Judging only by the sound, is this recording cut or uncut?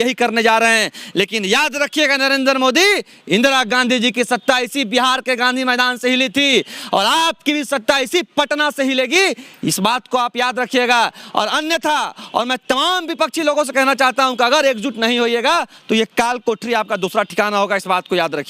uncut